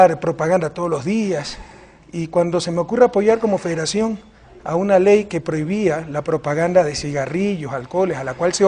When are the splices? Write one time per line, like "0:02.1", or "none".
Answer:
none